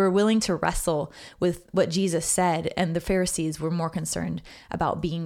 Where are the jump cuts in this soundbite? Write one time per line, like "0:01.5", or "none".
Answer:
none

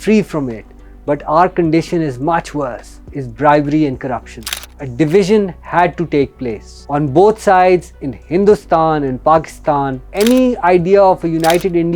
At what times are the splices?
0:04.7
0:10.0

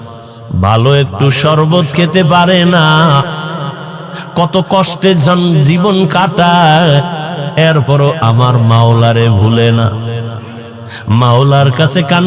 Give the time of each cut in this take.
none

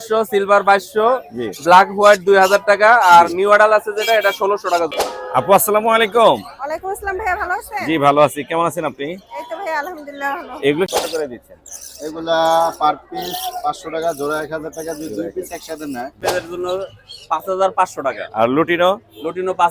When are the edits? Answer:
0:05.0
0:10.9
0:16.2

